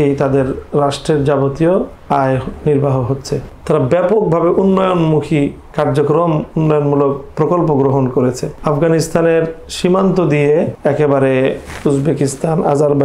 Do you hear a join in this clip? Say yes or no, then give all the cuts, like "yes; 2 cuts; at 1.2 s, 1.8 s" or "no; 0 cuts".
yes; 4 cuts; at 2.0 s, 3.5 s, 8.5 s, 10.7 s